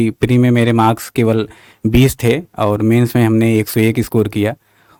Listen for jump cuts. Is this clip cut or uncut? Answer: uncut